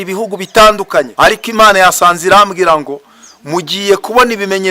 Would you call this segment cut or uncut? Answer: cut